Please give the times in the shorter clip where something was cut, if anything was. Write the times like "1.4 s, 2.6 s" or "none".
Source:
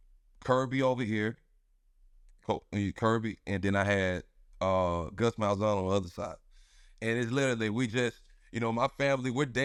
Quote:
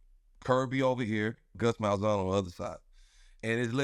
1.5 s